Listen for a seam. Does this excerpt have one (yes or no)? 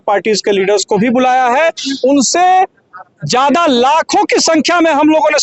no